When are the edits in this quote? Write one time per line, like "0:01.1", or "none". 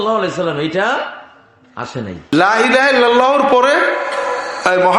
0:02.3